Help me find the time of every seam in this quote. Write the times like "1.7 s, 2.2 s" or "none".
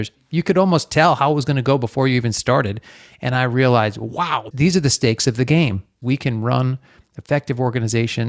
4.4 s, 6.0 s